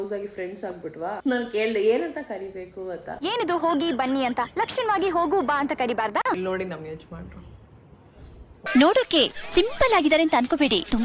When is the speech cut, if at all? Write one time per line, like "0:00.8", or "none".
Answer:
0:01.2
0:03.1
0:06.4